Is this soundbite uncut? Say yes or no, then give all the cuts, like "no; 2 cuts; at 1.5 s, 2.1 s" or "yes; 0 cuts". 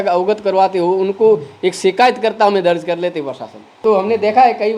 no; 1 cut; at 3.6 s